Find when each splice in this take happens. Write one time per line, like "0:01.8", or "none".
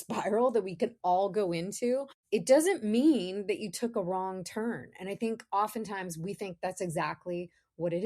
0:02.1